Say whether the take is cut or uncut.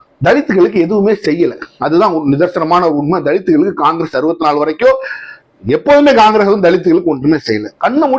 uncut